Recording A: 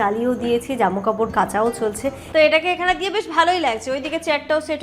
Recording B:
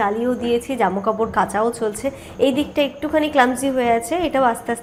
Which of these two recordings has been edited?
A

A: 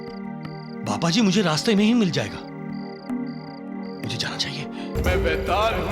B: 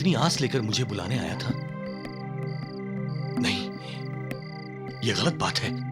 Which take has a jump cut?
A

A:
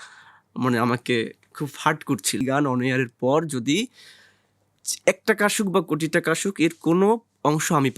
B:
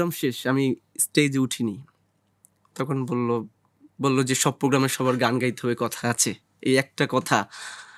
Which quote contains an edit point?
A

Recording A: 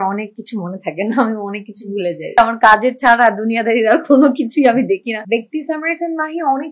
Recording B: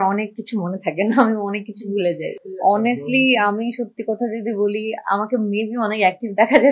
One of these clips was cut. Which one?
A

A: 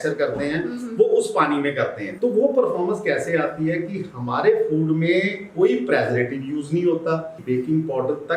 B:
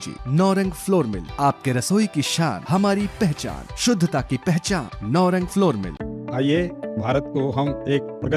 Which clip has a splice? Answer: A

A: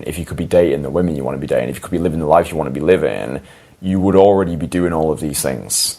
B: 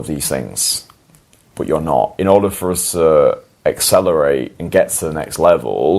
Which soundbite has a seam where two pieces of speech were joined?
B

